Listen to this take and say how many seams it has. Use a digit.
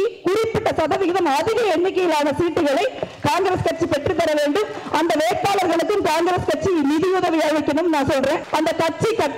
1